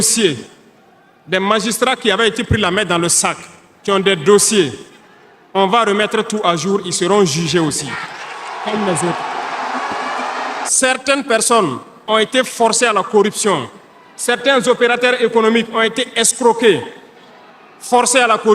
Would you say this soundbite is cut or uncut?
cut